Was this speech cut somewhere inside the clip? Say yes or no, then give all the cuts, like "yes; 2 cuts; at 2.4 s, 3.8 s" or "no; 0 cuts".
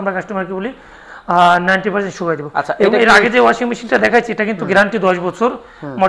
no; 0 cuts